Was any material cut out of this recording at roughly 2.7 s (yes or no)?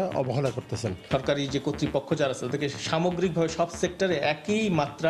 no